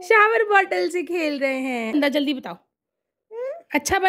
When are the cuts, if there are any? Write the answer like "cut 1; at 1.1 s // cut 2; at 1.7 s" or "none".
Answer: cut 1; at 1.9 s

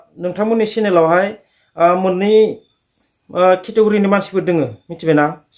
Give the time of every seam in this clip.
none

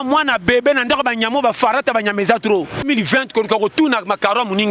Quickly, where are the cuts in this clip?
cut 1; at 2.8 s

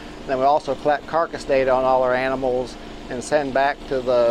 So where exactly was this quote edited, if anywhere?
none

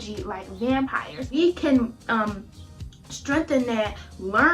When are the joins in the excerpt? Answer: cut 1; at 1.3 s

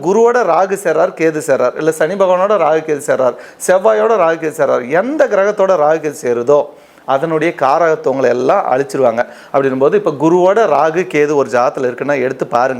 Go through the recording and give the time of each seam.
none

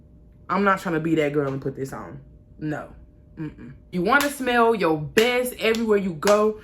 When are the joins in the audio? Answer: cut 1; at 3.9 s

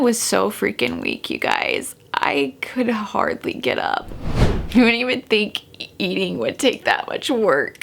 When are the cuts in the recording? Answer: cut 1; at 4.2 s

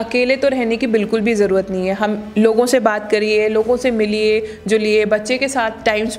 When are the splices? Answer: none

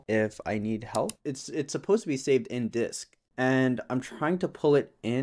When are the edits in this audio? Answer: cut 1; at 1.1 s // cut 2; at 3.2 s

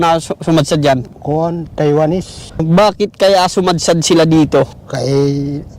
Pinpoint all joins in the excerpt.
cut 1; at 1.1 s // cut 2; at 2.4 s // cut 3; at 4.8 s

